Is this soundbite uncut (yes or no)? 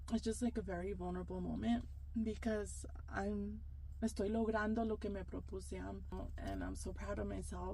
no